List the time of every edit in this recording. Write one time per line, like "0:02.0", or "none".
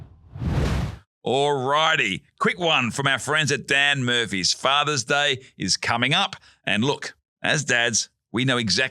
0:01.0